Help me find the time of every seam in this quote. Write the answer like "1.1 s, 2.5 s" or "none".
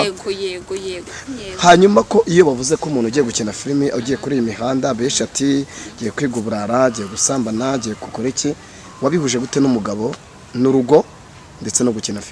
1.1 s